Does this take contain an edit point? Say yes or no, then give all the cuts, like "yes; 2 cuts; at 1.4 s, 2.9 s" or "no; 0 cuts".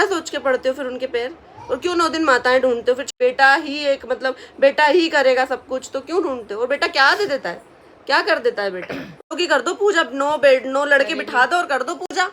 yes; 2 cuts; at 3.1 s, 9.3 s